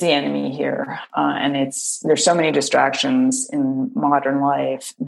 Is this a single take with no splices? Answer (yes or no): no